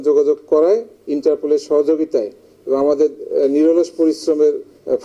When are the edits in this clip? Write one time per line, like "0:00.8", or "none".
none